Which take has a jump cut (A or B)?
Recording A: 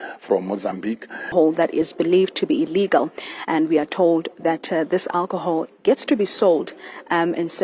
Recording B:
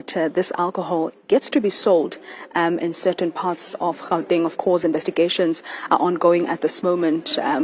A